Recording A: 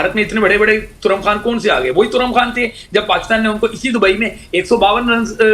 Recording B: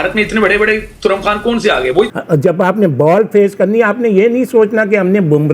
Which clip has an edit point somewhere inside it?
B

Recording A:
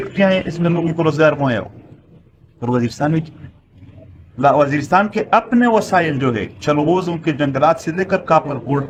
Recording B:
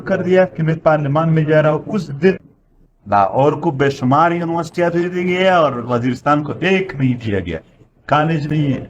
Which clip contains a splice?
B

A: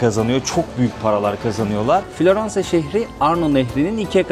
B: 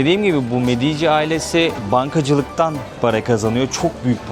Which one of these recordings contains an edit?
A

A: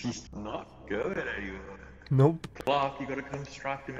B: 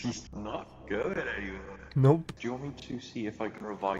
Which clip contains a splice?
B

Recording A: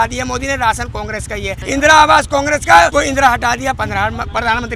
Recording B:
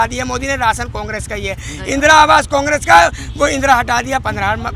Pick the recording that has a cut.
A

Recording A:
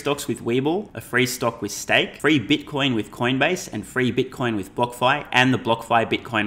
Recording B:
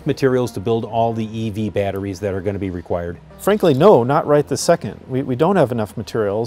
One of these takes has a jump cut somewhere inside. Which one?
A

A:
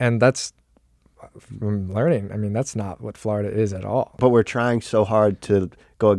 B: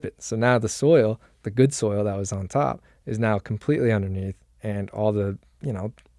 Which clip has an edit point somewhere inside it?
A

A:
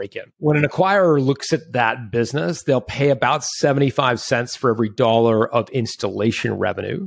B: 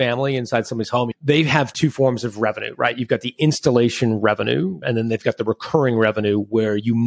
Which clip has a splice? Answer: B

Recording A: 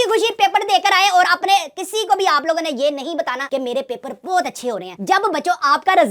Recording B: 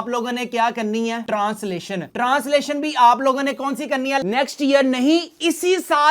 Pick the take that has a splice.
B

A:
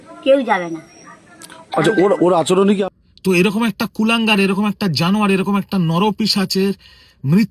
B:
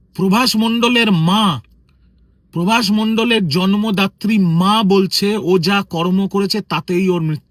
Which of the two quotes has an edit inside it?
A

